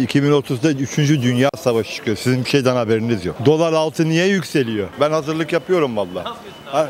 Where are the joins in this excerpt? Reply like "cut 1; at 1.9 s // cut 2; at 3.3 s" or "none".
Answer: cut 1; at 3.3 s // cut 2; at 4.9 s